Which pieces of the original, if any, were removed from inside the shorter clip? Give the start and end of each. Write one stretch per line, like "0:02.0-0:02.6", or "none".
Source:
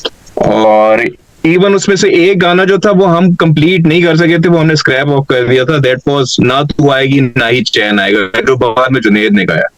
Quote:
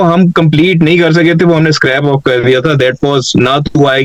none